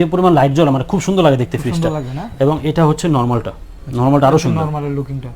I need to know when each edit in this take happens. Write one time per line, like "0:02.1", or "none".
none